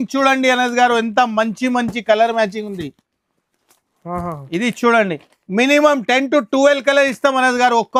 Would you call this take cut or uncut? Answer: uncut